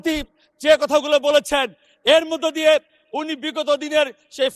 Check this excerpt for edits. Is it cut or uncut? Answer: uncut